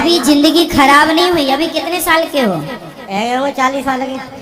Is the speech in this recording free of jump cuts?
yes; 0 cuts

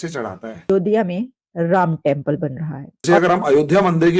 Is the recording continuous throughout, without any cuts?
no; 2 cuts; at 0.7 s, 2.9 s

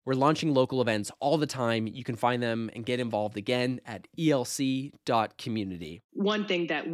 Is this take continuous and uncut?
no; 1 cut; at 6.0 s

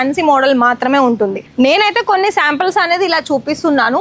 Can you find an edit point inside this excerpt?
yes; 1 cut; at 1.4 s

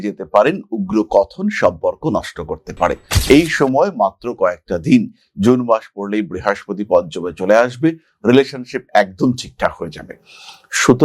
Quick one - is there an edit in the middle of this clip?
yes; 1 cut; at 3.1 s

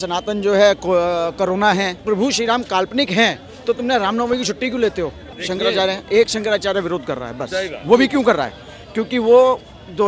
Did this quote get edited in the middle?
yes; 2 cuts; at 2.0 s, 5.3 s

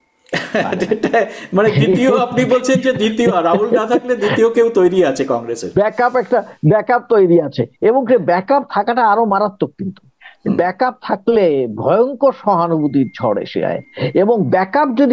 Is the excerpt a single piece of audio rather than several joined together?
yes; 0 cuts

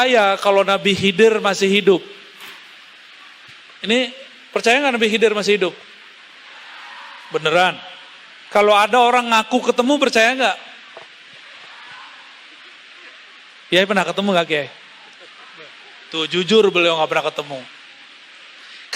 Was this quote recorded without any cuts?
yes; 0 cuts

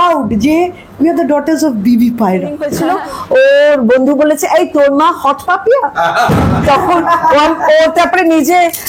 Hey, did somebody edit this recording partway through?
yes; 1 cut; at 2.6 s

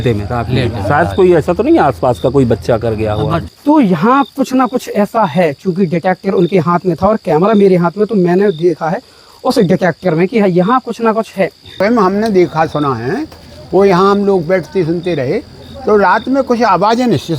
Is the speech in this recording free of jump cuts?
no; 2 cuts; at 3.4 s, 11.7 s

